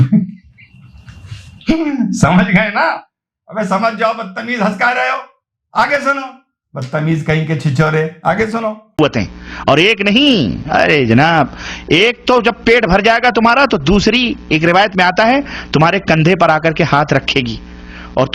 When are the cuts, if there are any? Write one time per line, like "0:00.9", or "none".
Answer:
0:08.8